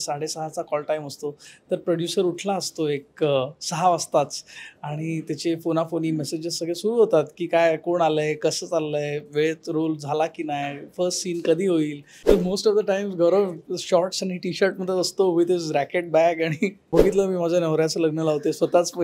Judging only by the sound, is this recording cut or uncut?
cut